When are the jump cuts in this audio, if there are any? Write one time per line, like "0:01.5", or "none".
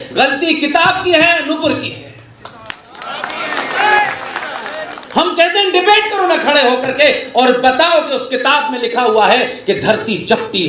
none